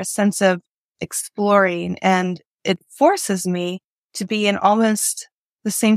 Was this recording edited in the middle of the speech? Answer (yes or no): no